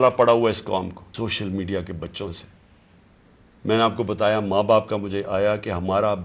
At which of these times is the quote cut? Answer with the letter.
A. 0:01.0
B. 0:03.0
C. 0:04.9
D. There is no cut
A